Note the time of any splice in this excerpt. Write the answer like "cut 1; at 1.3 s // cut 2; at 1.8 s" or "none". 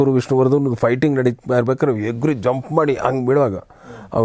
none